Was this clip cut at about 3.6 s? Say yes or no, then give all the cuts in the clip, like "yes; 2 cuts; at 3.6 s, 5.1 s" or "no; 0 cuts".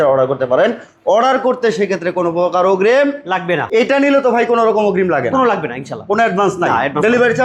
yes; 1 cut; at 3.6 s